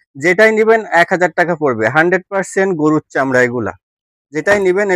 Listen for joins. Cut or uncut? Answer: uncut